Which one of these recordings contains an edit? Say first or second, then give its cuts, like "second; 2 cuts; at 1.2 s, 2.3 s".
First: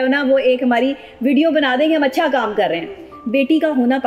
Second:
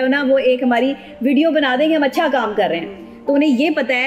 first; 1 cut; at 3.1 s